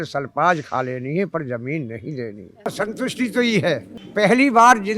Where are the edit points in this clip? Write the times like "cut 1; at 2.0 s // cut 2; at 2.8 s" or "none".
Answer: cut 1; at 2.7 s // cut 2; at 4.0 s